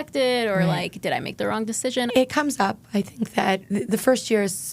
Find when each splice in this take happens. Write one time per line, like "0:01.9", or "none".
0:02.1
0:03.6